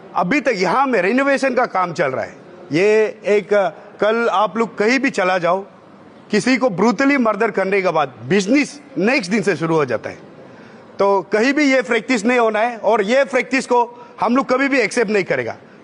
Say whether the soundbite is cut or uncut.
uncut